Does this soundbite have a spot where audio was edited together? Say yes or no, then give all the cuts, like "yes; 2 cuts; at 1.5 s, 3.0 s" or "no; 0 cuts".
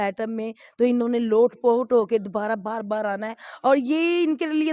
no; 0 cuts